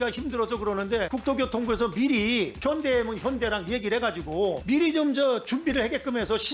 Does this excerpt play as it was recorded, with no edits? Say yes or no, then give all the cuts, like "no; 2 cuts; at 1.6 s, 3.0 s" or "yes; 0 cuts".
no; 1 cut; at 1.1 s